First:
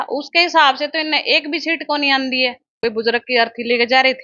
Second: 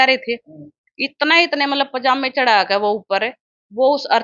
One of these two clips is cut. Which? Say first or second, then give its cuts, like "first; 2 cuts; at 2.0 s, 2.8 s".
first; 1 cut; at 2.7 s